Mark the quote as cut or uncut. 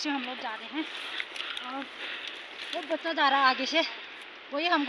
uncut